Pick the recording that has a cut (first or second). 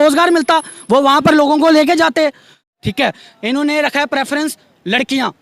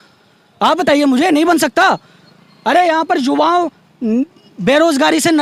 first